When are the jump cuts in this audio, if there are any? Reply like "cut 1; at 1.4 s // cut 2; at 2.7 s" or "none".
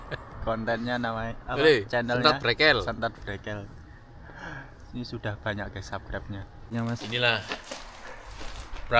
cut 1; at 6.7 s